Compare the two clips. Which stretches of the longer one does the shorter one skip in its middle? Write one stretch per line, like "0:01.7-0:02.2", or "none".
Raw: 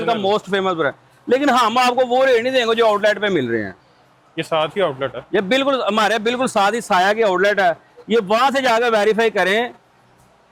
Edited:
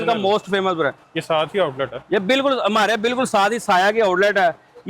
0:01.1-0:04.3